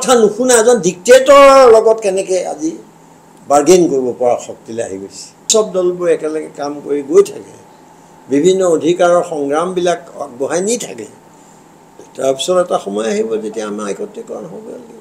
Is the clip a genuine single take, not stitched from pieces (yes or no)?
no